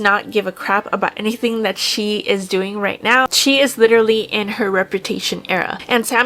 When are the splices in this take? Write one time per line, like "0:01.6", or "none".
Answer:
none